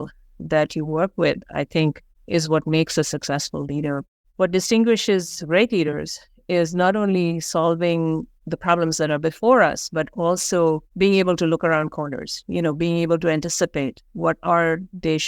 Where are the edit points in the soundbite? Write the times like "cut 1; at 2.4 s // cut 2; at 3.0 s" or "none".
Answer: cut 1; at 2.1 s // cut 2; at 4.1 s